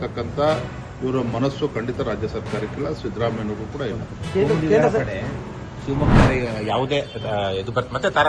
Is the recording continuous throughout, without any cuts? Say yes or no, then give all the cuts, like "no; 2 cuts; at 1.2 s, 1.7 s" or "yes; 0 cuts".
yes; 0 cuts